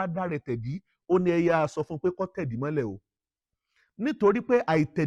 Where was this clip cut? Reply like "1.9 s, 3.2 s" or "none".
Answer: none

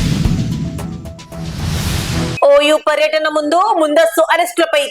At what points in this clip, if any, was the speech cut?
2.3 s

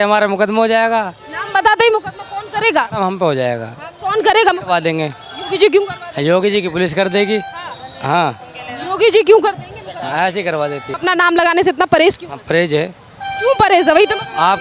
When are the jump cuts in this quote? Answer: 10.9 s

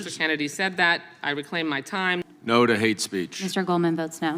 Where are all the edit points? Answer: 2.3 s

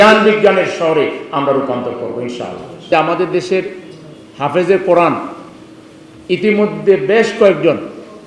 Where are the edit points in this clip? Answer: 2.9 s

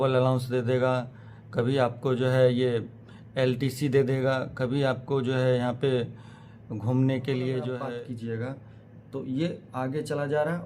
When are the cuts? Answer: 7.8 s

